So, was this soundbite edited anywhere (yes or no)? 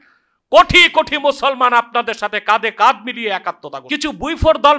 yes